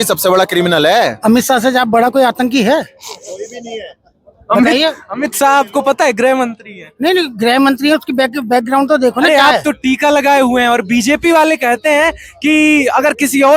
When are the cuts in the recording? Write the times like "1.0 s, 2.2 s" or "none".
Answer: 1.1 s, 9.3 s

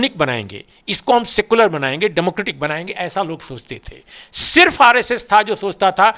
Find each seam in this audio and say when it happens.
none

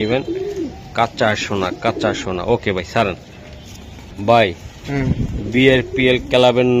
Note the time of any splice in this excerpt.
none

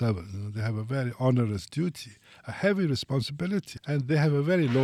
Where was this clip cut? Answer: none

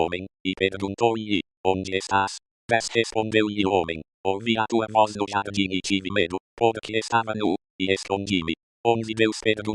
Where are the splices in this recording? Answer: none

